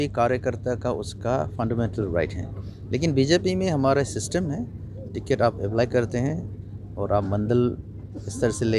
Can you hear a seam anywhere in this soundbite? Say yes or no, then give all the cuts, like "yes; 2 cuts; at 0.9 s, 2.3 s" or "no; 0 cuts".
no; 0 cuts